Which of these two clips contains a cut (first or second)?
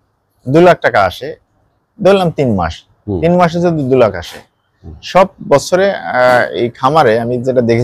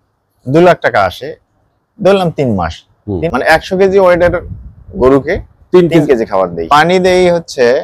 second